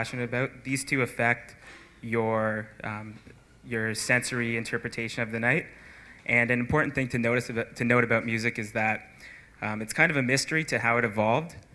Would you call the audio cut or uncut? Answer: cut